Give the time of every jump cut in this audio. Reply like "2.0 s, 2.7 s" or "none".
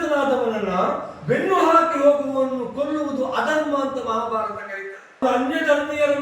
5.2 s